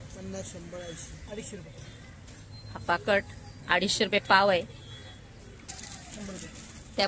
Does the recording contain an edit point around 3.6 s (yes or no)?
no